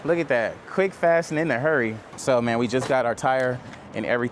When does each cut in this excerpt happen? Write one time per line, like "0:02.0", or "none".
0:02.1